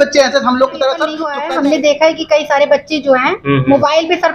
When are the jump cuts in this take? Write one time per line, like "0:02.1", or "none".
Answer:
0:01.3